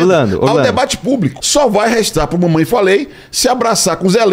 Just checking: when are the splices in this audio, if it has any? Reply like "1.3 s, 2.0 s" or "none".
1.4 s

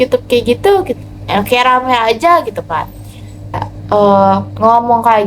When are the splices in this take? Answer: 3.7 s

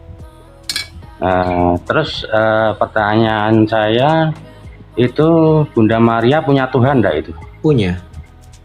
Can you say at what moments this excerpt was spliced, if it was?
none

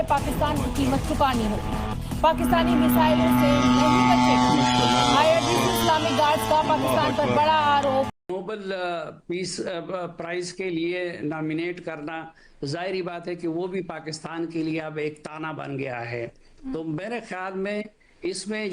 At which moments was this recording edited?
8.2 s

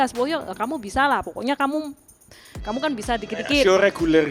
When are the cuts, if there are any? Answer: none

